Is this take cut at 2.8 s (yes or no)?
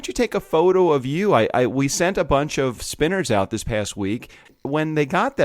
yes